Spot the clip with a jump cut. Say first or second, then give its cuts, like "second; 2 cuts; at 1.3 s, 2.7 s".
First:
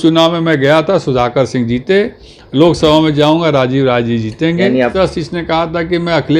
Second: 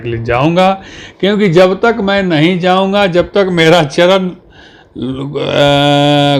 first; 1 cut; at 4.9 s